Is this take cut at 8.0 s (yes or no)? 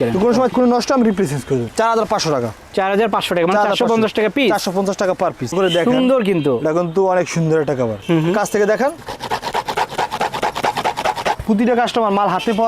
yes